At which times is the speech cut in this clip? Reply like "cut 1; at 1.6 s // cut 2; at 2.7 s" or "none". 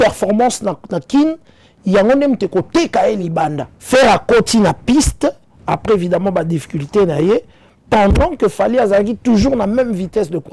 cut 1; at 3.7 s